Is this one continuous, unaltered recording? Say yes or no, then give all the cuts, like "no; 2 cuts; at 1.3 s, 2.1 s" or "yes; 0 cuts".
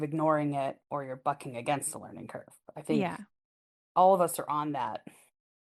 yes; 0 cuts